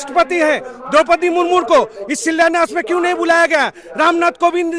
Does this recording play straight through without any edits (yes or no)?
yes